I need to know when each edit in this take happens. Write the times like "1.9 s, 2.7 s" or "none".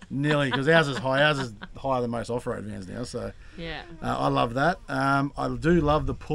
none